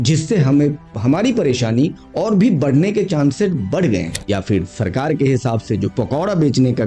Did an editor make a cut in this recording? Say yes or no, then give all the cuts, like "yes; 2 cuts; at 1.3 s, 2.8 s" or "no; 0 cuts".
yes; 1 cut; at 4.2 s